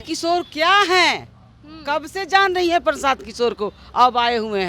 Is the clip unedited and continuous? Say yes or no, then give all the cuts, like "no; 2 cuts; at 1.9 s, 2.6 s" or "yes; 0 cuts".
yes; 0 cuts